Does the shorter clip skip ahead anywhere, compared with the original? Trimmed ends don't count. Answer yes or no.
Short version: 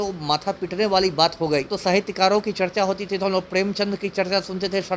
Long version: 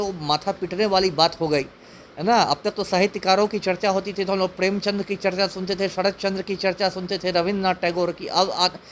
yes